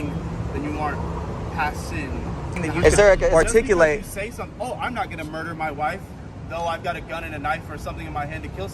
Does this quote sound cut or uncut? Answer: cut